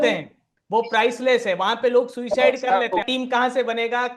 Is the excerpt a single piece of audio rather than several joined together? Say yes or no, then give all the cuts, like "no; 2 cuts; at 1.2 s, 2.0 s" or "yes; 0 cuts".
no; 1 cut; at 3.1 s